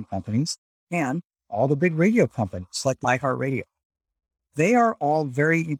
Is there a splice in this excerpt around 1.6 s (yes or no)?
no